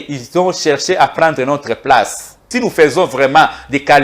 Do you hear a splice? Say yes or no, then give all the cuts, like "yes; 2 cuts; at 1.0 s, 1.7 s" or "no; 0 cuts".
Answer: yes; 1 cut; at 2.4 s